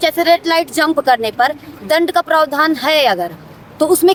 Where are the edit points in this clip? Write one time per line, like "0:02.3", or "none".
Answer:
none